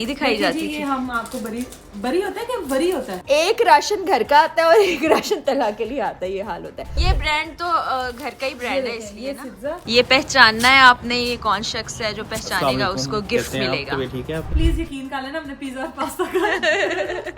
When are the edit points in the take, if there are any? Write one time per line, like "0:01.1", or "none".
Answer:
0:03.2
0:06.9
0:09.8
0:14.5